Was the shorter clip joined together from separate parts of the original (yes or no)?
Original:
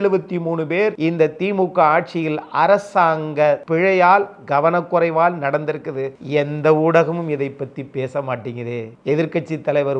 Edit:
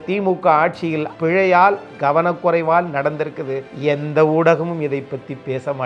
yes